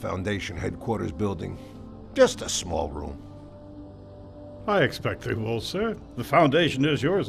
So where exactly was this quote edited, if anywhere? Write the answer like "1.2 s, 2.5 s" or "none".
none